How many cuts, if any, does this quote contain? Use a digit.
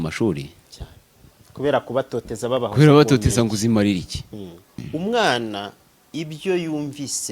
1